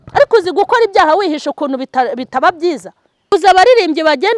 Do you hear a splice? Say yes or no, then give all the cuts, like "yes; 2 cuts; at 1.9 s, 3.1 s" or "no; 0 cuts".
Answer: yes; 1 cut; at 3.3 s